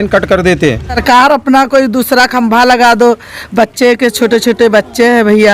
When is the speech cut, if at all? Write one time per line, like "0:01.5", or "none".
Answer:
0:01.0